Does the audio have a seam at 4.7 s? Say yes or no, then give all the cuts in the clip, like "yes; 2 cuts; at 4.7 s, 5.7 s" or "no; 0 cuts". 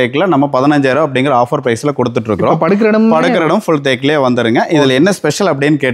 no; 0 cuts